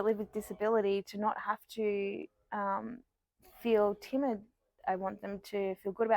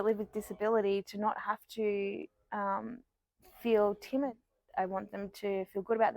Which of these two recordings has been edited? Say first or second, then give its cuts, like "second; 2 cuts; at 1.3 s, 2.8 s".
second; 1 cut; at 4.3 s